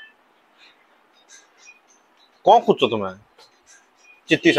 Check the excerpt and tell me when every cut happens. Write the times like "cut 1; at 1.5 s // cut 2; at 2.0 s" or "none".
none